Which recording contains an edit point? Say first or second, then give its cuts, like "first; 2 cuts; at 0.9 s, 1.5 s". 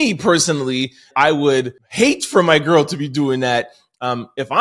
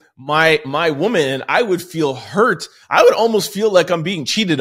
first; 2 cuts; at 1.1 s, 1.8 s